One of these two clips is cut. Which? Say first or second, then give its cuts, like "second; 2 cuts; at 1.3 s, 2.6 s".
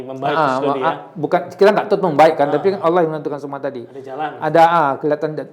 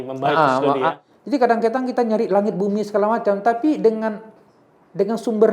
second; 1 cut; at 1.1 s